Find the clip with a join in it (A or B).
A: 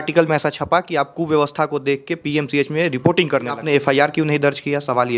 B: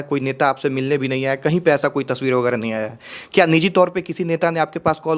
A